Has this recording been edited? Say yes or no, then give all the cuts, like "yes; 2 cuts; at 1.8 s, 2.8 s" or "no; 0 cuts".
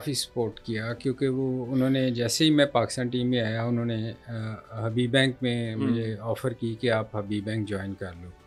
no; 0 cuts